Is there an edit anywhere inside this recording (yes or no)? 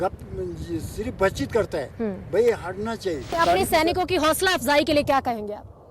yes